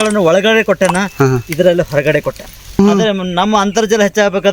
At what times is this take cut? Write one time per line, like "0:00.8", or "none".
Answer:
0:02.8